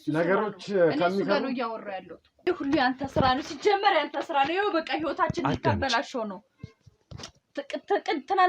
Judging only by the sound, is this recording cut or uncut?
cut